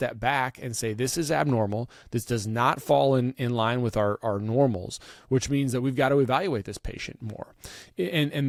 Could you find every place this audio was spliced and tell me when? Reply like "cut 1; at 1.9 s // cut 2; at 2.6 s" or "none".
none